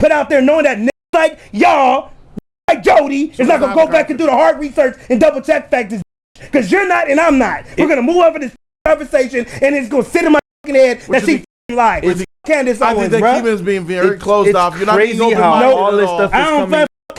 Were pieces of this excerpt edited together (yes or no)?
no